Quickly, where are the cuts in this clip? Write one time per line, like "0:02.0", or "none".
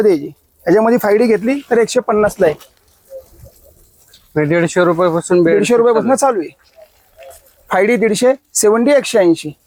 none